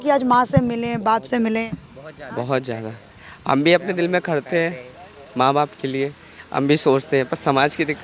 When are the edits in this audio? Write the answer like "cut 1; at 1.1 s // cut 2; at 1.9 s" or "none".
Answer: none

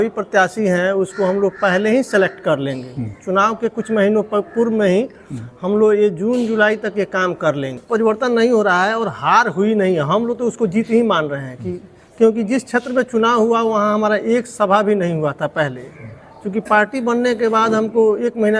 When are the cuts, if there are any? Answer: cut 1; at 7.7 s

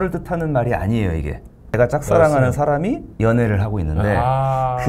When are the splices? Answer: cut 1; at 1.8 s // cut 2; at 3.1 s

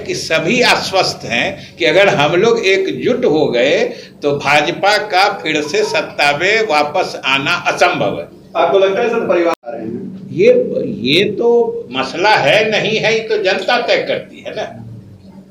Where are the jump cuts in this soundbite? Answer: none

